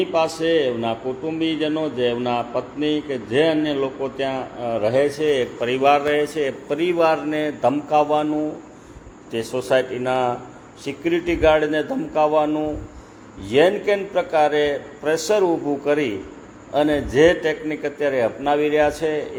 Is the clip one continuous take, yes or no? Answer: yes